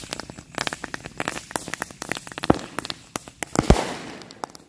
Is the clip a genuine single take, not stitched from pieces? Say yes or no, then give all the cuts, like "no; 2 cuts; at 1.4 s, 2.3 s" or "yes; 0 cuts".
yes; 0 cuts